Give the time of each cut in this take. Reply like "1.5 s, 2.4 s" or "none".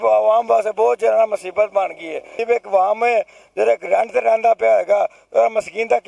2.3 s